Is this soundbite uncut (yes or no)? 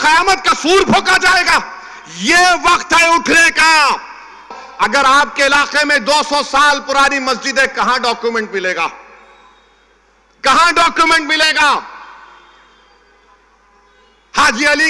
no